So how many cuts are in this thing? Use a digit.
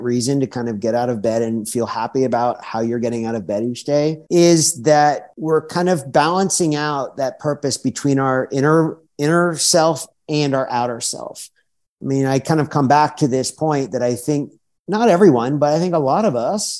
2